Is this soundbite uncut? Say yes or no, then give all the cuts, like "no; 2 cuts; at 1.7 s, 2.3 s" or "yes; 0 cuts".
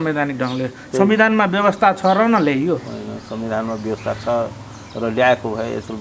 yes; 0 cuts